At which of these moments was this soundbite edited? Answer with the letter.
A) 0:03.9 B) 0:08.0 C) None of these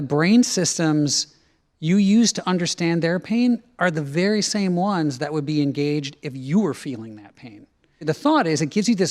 B